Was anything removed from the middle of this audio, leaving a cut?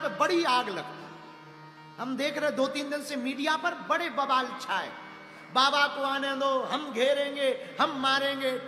no; 0 cuts

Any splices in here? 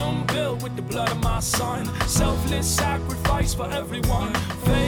no; 0 cuts

